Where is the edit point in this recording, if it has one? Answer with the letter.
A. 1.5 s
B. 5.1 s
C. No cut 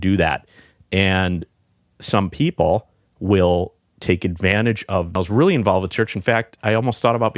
B